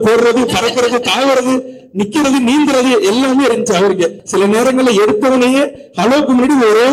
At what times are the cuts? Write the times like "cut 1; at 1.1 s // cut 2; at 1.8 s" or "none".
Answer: cut 1; at 4.2 s